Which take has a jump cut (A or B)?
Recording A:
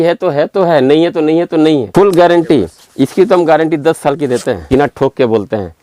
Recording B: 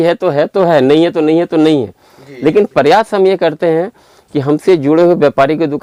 A